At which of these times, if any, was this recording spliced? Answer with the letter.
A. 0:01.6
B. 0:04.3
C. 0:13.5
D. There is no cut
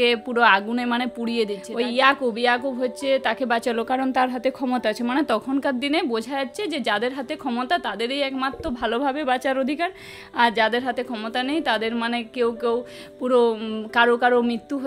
A